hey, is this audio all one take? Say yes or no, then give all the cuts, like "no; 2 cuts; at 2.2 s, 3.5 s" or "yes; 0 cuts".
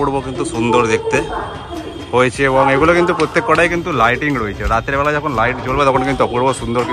yes; 0 cuts